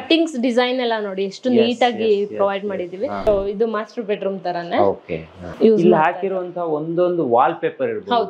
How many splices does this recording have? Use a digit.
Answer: 2